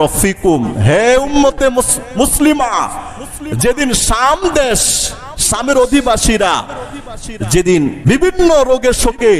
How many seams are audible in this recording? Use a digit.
1